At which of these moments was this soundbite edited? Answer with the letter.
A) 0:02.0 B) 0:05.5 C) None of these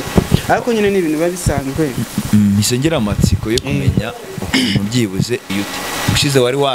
B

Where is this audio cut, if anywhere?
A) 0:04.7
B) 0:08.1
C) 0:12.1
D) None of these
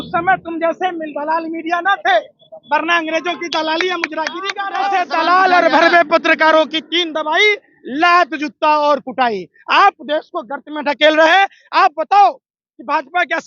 A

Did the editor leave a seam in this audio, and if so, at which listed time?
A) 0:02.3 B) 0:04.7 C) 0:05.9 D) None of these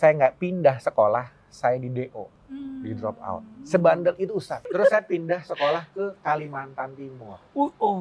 B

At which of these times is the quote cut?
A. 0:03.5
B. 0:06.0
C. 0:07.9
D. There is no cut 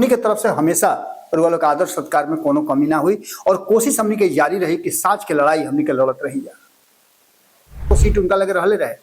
C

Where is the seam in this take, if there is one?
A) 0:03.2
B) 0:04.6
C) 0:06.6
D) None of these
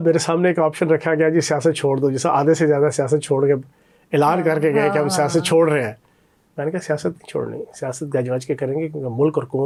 D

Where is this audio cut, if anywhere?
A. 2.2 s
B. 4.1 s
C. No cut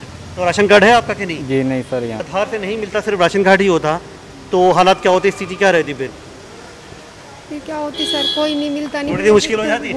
A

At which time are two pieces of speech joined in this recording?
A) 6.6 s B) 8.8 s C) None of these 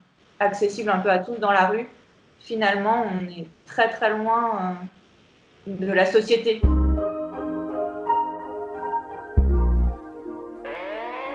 A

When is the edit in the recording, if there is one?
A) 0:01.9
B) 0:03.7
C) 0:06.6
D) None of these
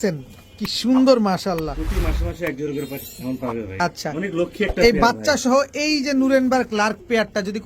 B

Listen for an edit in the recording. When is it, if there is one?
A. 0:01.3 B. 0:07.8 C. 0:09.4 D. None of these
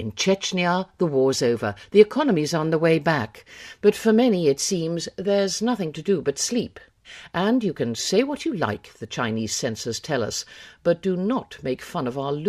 B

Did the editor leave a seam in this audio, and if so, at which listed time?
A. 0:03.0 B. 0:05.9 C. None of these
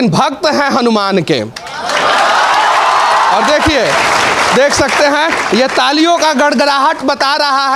C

